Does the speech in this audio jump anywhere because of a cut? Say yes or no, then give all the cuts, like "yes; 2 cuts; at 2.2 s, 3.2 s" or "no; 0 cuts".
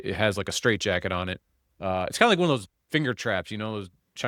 no; 0 cuts